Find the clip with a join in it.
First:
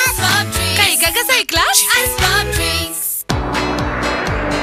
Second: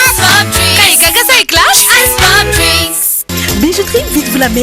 second; 1 cut; at 3.1 s

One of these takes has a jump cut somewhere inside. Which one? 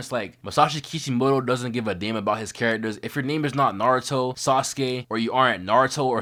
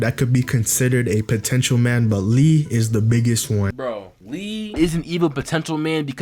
second; 1 cut; at 3.7 s

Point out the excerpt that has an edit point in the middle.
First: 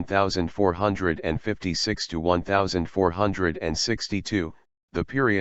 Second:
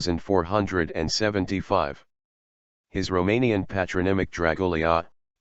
second; 1 cut; at 1.5 s

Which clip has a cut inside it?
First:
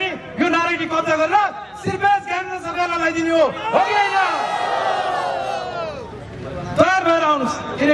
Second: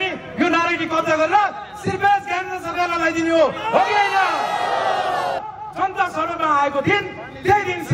second; 1 cut; at 5.4 s

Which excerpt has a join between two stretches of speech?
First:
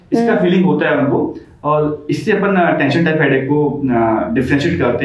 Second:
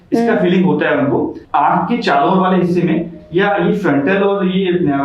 second; 1 cut; at 1.4 s

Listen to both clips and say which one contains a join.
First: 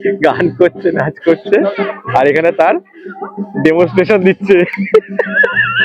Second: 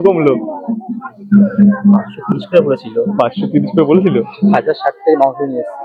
first; 1 cut; at 4.8 s

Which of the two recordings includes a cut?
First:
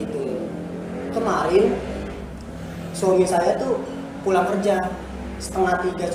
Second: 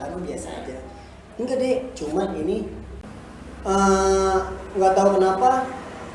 second; 1 cut; at 2.9 s

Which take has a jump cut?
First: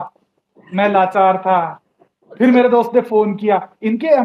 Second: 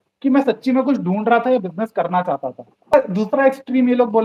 second; 1 cut; at 2.9 s

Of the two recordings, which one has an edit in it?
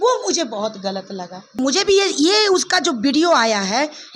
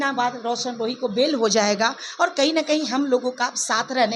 first; 1 cut; at 1.6 s

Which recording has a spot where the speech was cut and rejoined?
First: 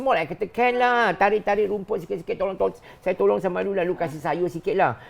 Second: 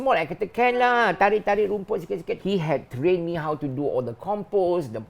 second; 1 cut; at 2.3 s

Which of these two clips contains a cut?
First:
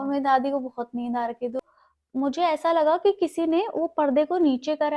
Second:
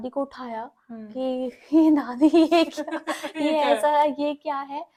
first; 1 cut; at 1.6 s

